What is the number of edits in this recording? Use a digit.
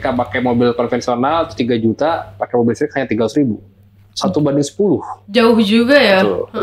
0